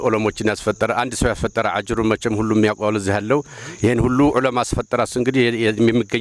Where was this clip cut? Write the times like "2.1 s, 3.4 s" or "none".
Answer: none